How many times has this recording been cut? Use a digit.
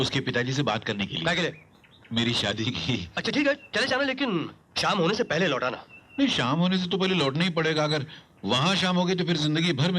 1